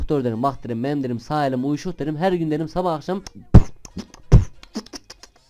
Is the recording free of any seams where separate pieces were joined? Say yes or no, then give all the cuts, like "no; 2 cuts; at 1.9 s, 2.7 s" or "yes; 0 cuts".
no; 1 cut; at 3.3 s